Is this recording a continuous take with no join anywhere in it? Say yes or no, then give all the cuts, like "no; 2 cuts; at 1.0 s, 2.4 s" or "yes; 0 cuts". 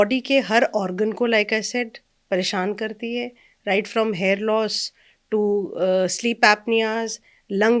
yes; 0 cuts